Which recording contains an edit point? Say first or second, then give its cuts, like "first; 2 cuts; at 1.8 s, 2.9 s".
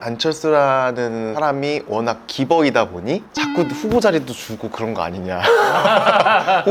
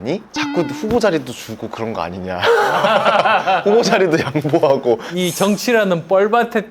second; 1 cut; at 5.1 s